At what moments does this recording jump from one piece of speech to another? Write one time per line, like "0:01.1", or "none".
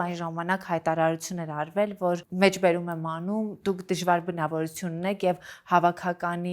0:02.3